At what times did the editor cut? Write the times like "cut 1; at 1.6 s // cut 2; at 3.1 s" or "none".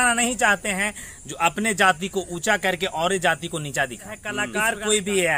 cut 1; at 4.3 s